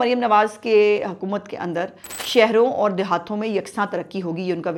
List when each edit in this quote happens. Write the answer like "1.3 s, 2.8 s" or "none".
none